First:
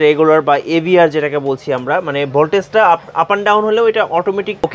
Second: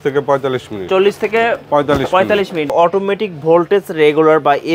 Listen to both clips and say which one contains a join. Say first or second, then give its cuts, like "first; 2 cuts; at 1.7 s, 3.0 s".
second; 1 cut; at 2.7 s